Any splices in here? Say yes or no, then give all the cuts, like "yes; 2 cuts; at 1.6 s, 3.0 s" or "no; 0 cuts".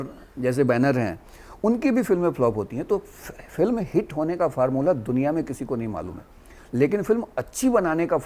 no; 0 cuts